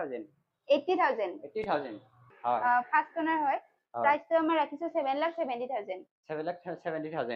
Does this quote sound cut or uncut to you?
cut